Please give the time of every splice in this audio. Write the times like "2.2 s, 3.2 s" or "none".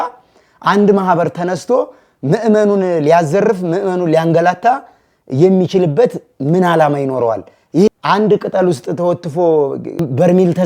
7.9 s

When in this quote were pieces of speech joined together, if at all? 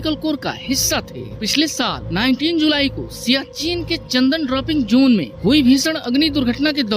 1.3 s

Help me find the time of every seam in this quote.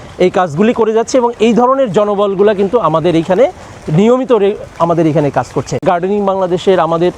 5.8 s

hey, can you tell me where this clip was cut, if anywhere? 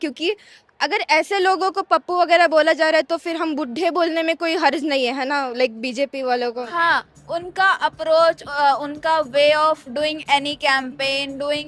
6.7 s

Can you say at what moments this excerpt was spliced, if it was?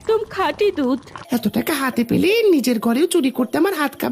1.1 s

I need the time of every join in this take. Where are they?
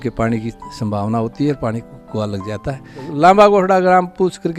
3.1 s

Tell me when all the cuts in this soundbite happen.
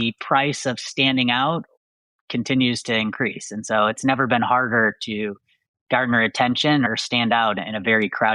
4.0 s, 6.9 s

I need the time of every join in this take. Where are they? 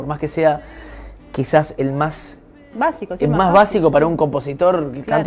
none

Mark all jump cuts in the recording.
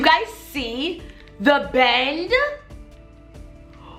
none

